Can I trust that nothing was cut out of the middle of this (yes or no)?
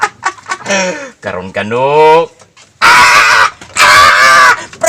yes